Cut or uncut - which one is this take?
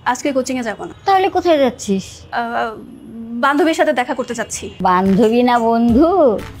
cut